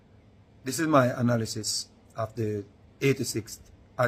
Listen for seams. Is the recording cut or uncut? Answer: uncut